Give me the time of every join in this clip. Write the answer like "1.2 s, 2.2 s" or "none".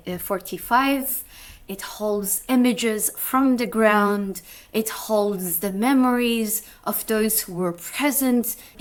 none